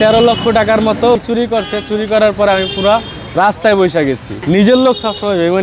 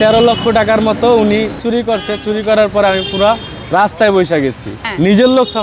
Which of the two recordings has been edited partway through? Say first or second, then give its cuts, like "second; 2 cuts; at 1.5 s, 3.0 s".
first; 2 cuts; at 1.2 s, 4.3 s